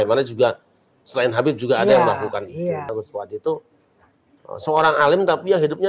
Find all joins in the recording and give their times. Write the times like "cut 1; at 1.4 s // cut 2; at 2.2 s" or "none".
cut 1; at 2.9 s